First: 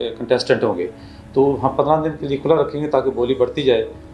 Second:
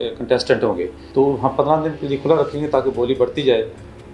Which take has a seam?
second; 1 cut; at 1.0 s

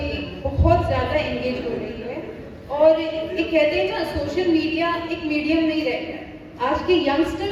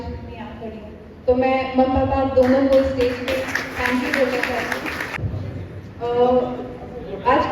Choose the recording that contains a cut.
second; 1 cut; at 5.2 s

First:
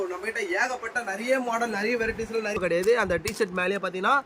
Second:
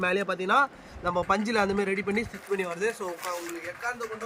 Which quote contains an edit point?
first; 1 cut; at 2.6 s

